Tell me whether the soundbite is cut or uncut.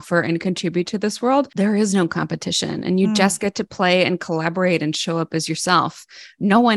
cut